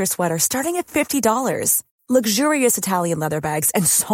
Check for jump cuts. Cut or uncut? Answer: uncut